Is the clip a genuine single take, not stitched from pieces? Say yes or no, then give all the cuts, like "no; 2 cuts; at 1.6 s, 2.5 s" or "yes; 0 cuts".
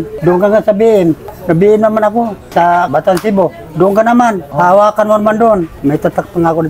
yes; 0 cuts